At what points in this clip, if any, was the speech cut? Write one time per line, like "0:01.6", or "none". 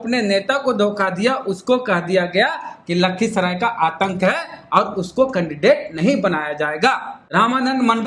0:07.1